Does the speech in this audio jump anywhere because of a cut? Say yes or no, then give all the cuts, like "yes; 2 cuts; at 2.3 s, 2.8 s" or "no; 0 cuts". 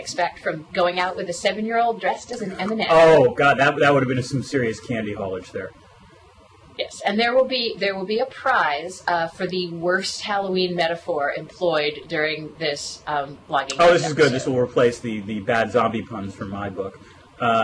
no; 0 cuts